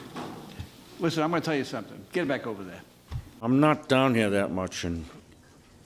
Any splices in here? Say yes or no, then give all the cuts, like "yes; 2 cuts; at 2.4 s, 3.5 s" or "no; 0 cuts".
yes; 1 cut; at 3.3 s